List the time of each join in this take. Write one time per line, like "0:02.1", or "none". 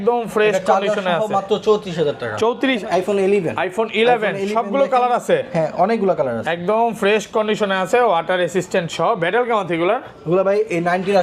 0:02.8